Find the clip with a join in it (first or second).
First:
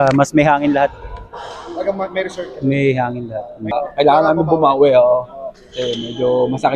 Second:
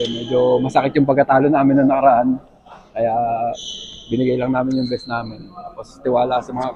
first